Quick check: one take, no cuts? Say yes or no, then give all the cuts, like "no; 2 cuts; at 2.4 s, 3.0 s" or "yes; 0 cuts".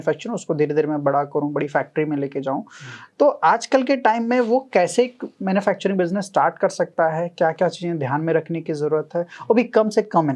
yes; 0 cuts